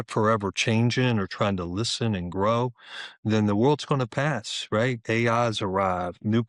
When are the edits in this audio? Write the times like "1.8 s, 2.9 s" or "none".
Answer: none